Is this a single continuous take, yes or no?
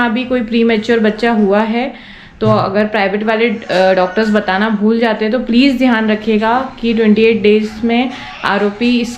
yes